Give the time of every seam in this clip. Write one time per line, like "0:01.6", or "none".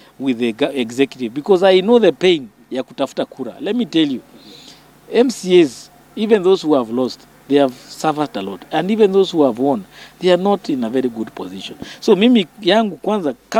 none